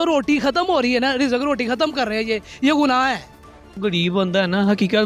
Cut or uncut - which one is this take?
cut